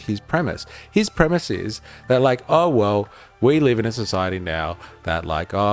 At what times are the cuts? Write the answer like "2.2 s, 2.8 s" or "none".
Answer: none